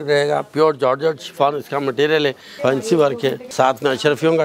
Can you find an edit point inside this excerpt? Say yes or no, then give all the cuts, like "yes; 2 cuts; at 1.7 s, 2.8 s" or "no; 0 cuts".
yes; 2 cuts; at 2.5 s, 3.4 s